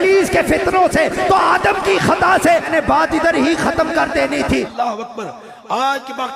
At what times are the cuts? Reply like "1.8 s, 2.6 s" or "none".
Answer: 2.7 s, 4.7 s

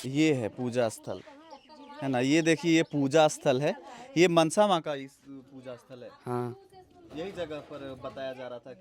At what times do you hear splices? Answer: none

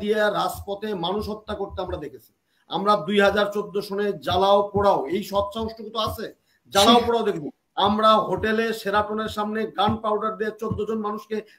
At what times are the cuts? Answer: none

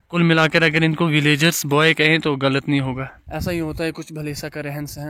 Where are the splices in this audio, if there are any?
3.1 s

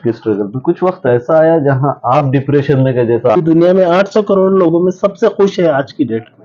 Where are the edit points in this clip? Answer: 3.4 s

